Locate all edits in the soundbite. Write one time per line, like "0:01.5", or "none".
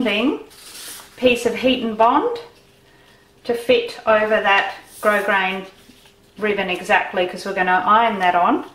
0:05.3